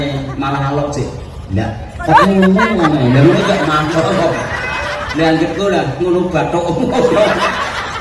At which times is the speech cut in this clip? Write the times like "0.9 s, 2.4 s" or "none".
none